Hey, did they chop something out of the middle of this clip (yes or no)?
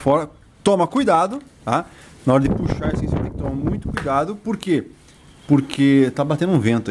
no